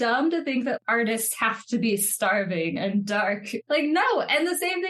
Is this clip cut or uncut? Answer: cut